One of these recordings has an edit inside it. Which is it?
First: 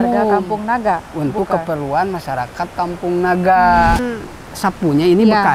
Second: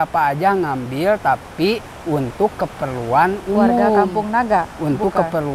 first; 1 cut; at 4.0 s

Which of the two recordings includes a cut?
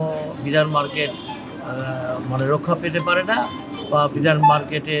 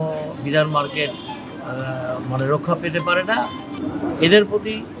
second; 1 cut; at 3.7 s

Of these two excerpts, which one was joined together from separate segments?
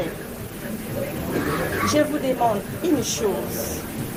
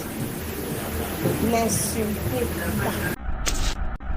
second; 1 cut; at 3.1 s

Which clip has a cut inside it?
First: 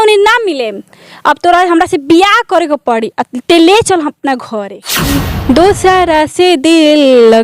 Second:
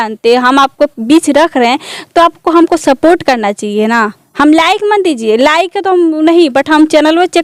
first; 1 cut; at 5.2 s

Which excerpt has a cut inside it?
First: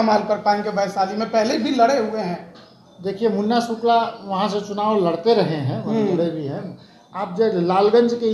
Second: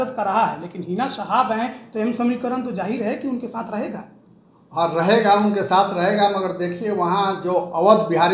first; 1 cut; at 7.0 s

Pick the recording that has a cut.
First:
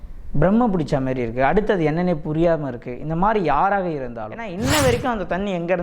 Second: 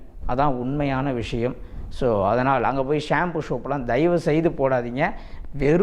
first; 1 cut; at 4.5 s

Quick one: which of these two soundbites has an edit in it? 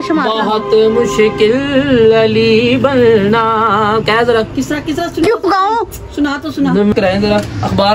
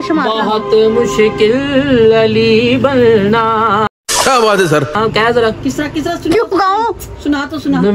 first; 2 cuts; at 3.9 s, 6.9 s

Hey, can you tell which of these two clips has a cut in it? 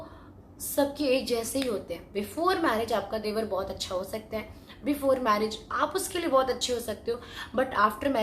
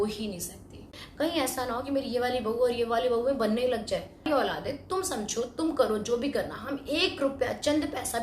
second; 2 cuts; at 1.0 s, 4.3 s

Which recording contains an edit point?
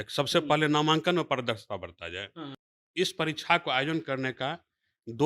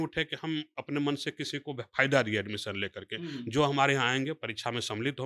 first; 1 cut; at 2.6 s

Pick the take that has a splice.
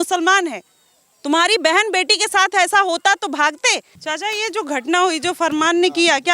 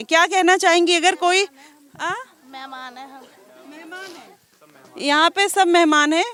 first; 1 cut; at 3.9 s

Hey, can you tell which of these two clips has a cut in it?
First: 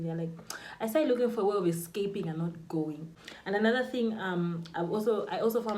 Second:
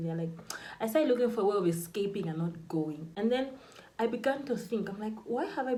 first; 1 cut; at 3.1 s

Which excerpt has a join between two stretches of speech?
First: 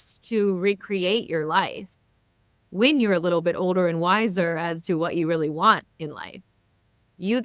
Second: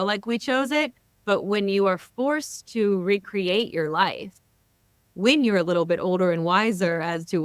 second; 1 cut; at 1.1 s

